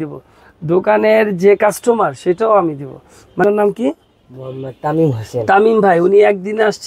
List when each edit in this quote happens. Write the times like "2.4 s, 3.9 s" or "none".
3.4 s